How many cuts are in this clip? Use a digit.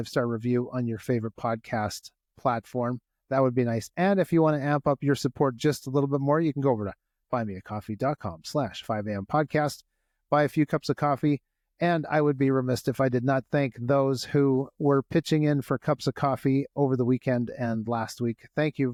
0